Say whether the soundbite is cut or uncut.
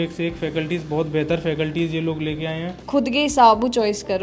cut